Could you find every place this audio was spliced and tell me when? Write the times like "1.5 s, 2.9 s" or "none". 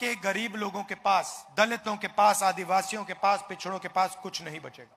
1.4 s